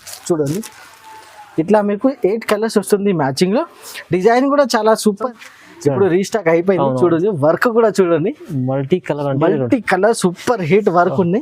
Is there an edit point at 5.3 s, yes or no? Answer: yes